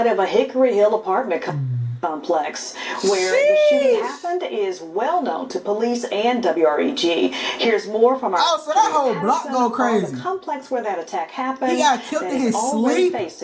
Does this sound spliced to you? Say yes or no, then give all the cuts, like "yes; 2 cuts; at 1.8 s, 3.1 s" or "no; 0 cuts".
no; 0 cuts